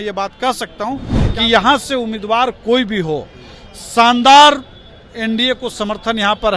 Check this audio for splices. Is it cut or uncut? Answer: cut